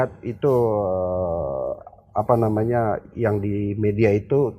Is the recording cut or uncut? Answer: uncut